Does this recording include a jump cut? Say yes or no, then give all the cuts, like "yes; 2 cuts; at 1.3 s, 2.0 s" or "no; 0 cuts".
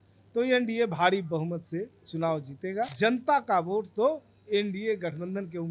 yes; 1 cut; at 2.9 s